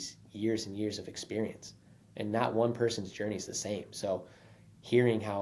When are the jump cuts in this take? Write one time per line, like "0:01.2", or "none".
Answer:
none